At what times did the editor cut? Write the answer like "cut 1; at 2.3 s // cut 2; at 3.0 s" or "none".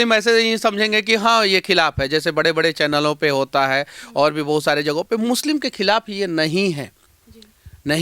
none